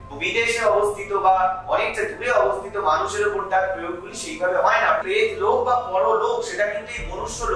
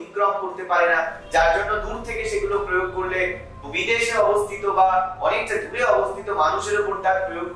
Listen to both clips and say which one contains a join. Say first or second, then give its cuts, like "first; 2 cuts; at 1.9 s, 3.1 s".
first; 1 cut; at 5.0 s